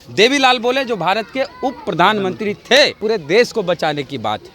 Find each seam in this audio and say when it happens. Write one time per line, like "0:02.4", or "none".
0:03.0